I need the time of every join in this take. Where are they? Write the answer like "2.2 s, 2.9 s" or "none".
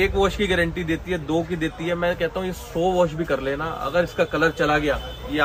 none